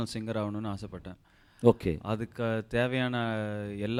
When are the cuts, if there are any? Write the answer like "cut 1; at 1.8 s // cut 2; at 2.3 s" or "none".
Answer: none